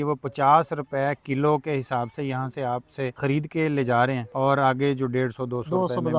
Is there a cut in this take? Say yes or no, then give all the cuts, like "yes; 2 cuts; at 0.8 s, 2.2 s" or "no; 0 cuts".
yes; 2 cuts; at 3.2 s, 4.3 s